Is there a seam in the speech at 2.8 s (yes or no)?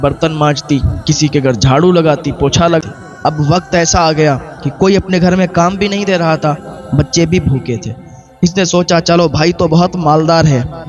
yes